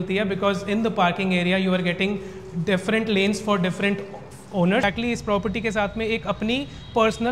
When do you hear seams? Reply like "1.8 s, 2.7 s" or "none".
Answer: 4.8 s